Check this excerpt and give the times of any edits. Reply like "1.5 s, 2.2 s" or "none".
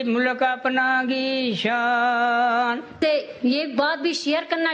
2.9 s